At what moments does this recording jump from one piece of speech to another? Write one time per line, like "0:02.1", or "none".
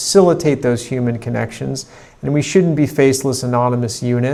none